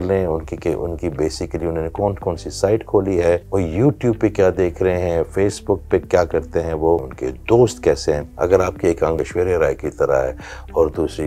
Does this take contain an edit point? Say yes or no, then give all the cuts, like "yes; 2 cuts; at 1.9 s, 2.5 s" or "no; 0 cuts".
yes; 4 cuts; at 3.5 s, 7.2 s, 8.3 s, 9.2 s